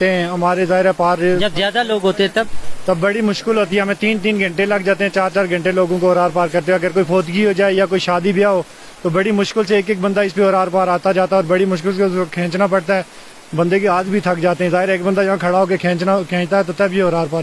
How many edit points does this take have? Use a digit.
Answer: 0